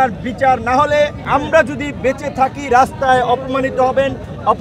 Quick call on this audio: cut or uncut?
cut